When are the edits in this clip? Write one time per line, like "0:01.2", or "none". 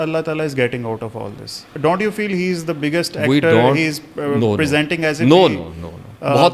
0:01.7